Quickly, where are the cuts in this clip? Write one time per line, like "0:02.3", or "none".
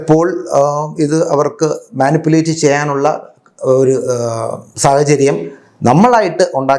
none